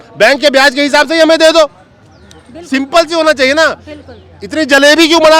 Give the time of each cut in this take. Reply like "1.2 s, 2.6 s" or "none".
none